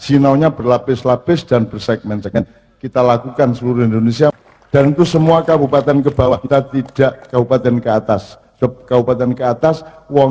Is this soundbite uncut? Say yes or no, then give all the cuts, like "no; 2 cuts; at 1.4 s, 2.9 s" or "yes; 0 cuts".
no; 1 cut; at 4.3 s